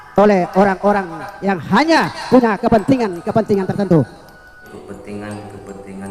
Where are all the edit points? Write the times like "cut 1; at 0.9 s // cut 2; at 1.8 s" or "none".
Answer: cut 1; at 4.7 s